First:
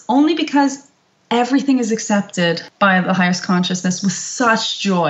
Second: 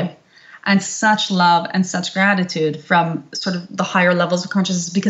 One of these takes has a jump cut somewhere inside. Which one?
first; 1 cut; at 2.7 s

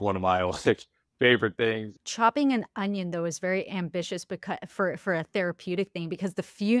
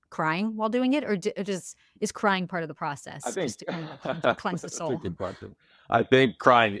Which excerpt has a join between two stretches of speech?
first; 1 cut; at 2.0 s

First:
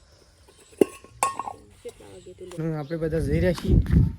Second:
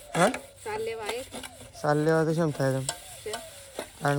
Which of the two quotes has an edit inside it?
first; 1 cut; at 2.6 s

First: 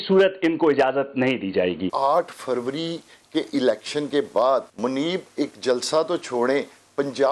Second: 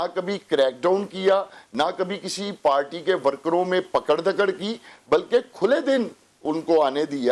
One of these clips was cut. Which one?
first; 2 cuts; at 1.9 s, 4.7 s

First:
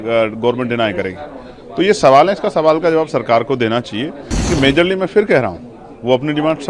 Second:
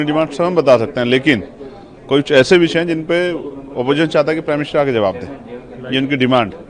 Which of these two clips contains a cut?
first; 1 cut; at 4.3 s

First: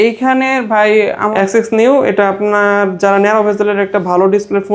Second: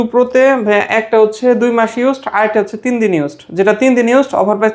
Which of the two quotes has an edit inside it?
first; 1 cut; at 1.3 s

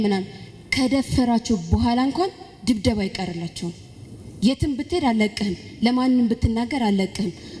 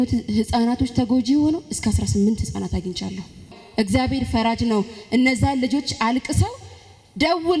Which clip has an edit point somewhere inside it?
second; 1 cut; at 3.5 s

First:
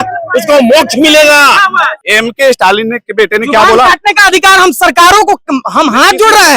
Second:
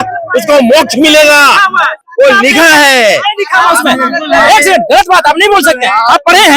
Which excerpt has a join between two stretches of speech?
first; 1 cut; at 2.0 s

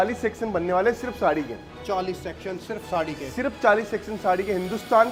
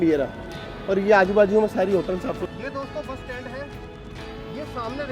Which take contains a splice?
second; 1 cut; at 2.4 s

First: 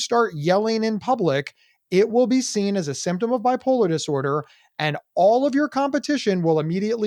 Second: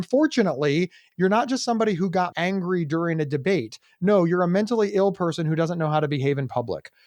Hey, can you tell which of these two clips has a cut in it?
second; 2 cuts; at 1.0 s, 2.3 s

